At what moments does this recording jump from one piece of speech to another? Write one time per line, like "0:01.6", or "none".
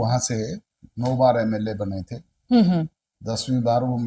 none